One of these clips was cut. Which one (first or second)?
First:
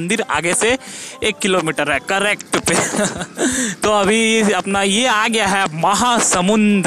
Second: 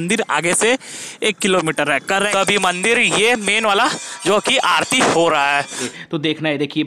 second